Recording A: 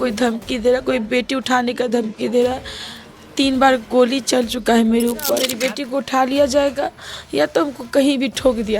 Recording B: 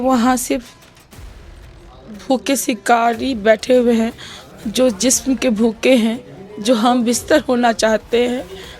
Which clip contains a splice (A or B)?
A